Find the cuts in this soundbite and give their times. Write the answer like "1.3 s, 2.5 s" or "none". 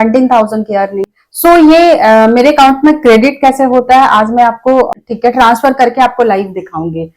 1.2 s, 4.9 s